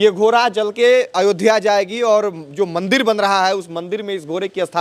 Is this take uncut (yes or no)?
yes